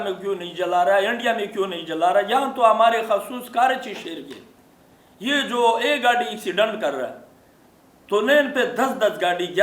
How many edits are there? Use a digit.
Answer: 0